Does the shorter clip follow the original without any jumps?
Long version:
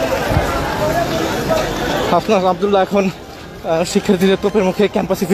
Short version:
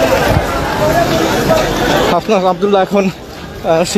yes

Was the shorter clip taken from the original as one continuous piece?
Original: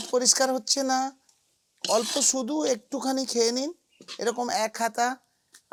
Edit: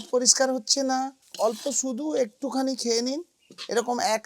no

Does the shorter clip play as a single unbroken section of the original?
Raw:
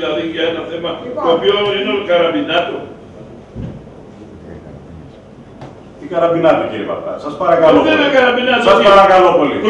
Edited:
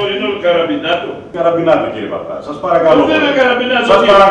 no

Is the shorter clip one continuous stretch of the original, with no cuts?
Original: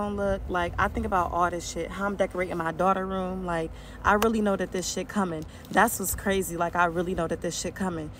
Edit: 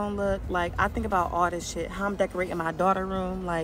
yes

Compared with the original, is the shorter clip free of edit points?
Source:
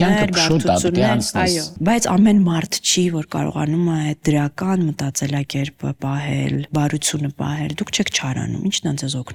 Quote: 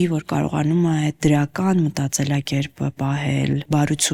yes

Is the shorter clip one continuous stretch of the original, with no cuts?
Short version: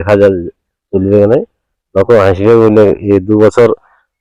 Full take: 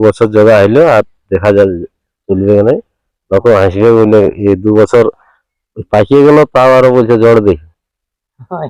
yes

